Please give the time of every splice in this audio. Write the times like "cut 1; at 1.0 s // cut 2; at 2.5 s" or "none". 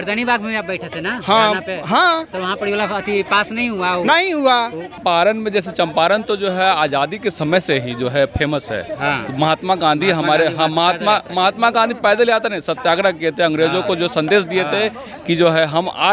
cut 1; at 5.0 s